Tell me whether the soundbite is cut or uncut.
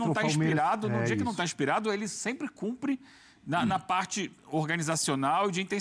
uncut